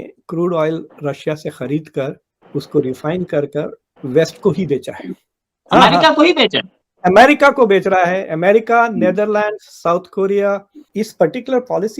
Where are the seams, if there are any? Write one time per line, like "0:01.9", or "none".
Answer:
0:10.8